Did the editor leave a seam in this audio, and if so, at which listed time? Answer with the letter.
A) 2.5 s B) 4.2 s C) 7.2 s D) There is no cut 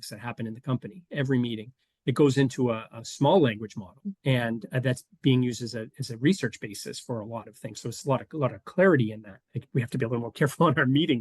B